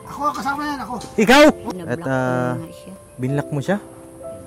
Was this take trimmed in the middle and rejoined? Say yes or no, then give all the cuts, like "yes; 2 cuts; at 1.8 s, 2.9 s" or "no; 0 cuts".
yes; 1 cut; at 1.6 s